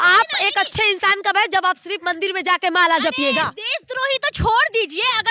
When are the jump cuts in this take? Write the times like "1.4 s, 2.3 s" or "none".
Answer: none